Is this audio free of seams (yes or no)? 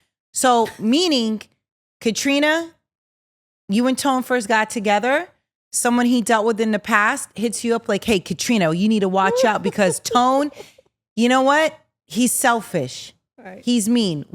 yes